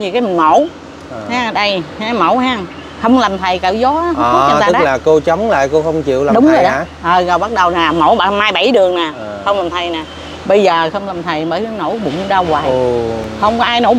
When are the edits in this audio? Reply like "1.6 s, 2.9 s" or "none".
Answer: none